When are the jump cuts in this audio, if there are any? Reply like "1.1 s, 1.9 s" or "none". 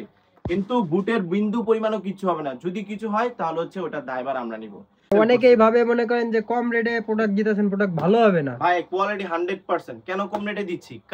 5.1 s